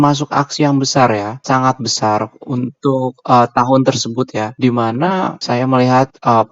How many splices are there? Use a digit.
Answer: 3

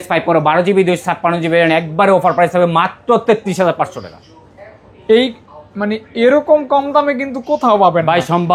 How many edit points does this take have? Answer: 0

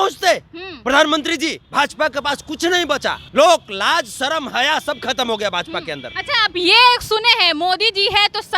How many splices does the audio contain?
3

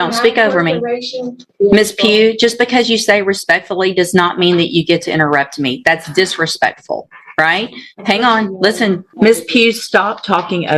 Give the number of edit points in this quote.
2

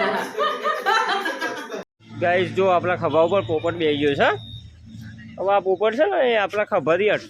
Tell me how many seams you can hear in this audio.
1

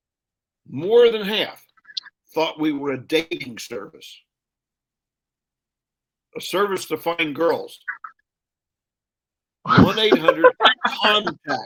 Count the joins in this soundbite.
0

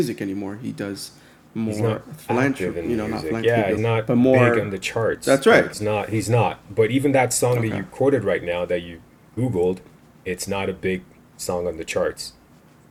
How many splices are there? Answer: 0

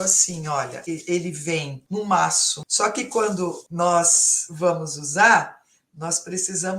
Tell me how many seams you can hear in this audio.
4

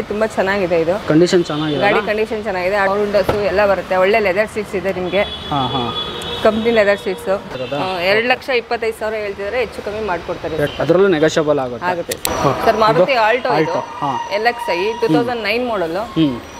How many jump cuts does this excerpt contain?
4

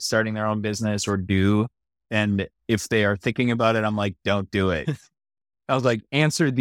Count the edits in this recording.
1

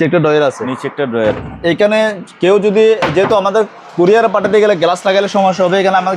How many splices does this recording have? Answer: 1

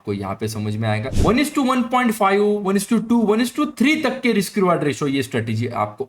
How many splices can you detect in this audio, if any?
1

